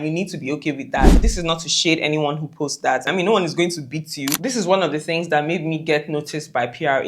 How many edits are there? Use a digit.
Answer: 3